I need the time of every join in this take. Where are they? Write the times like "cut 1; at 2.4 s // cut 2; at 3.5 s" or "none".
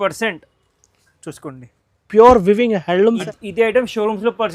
cut 1; at 3.2 s